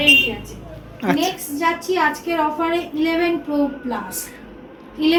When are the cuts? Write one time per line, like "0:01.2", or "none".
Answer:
none